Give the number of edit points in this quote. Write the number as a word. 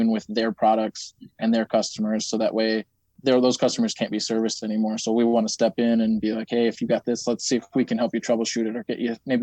one